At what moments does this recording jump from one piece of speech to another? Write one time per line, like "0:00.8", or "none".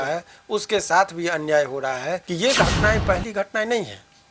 0:02.7